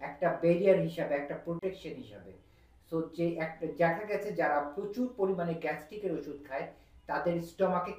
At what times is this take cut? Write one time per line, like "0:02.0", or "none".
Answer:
none